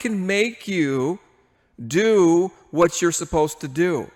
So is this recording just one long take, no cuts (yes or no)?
yes